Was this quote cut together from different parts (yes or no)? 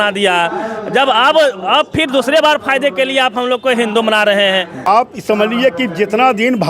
yes